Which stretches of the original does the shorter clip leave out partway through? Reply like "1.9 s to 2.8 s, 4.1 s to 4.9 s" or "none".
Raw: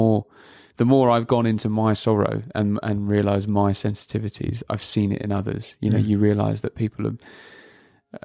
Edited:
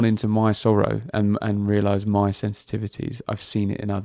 none